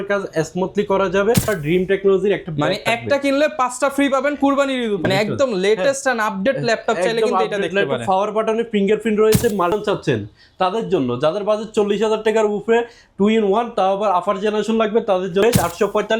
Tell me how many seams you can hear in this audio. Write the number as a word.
four